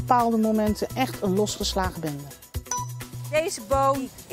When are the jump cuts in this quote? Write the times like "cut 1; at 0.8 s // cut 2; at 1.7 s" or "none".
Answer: cut 1; at 2.7 s